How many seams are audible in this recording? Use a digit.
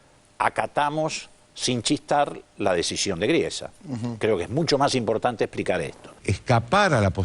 1